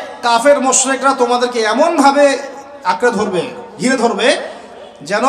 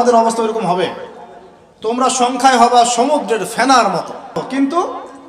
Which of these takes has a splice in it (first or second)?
second